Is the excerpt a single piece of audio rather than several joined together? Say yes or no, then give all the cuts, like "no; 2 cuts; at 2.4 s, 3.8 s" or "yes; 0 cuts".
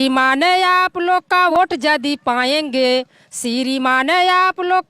no; 1 cut; at 1.5 s